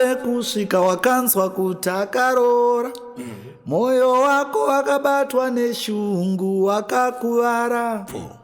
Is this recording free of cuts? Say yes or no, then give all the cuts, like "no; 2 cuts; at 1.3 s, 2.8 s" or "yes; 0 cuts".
yes; 0 cuts